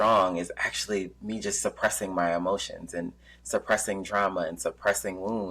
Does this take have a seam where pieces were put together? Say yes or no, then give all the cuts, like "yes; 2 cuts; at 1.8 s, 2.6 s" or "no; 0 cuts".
no; 0 cuts